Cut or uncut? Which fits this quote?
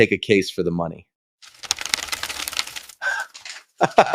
uncut